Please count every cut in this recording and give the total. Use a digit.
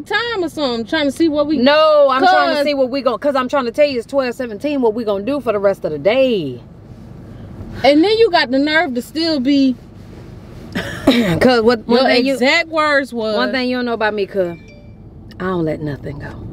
1